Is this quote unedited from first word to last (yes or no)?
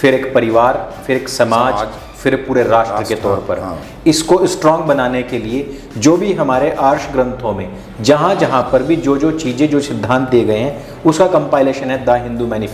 yes